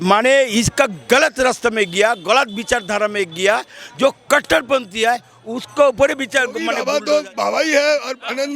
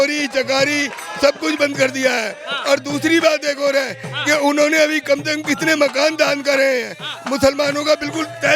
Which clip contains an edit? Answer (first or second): first